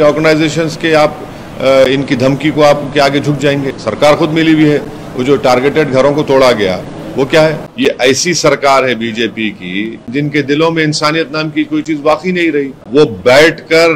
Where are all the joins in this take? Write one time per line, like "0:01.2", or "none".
0:03.7
0:07.7
0:10.1
0:12.8